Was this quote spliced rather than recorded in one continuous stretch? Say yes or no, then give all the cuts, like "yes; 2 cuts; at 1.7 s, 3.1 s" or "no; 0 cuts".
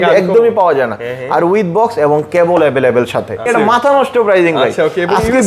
yes; 1 cut; at 3.5 s